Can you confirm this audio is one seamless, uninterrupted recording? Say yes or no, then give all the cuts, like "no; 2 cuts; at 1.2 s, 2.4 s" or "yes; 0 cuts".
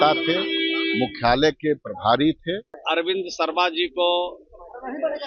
no; 1 cut; at 2.7 s